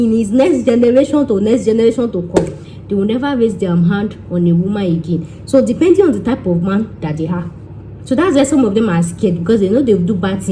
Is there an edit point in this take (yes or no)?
no